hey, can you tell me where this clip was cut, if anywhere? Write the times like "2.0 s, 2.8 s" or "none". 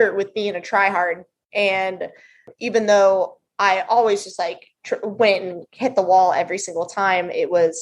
2.5 s